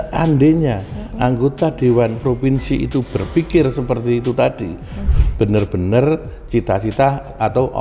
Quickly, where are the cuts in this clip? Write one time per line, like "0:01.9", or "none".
0:05.0